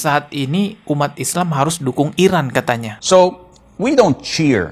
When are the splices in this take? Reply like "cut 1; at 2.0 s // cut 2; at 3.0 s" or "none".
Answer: cut 1; at 3.0 s